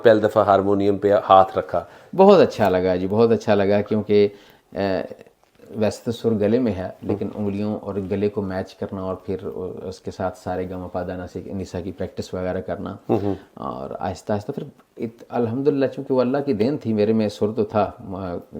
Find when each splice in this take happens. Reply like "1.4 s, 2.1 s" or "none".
none